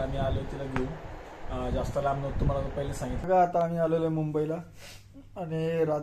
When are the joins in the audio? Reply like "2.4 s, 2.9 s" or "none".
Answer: 3.1 s